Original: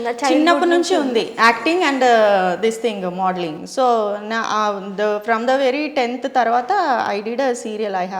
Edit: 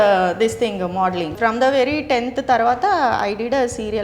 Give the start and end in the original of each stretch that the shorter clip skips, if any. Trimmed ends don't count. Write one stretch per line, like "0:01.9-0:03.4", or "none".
0:03.6-0:05.2